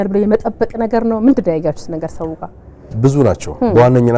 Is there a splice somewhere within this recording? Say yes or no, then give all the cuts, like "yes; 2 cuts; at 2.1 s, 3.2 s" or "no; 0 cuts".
no; 0 cuts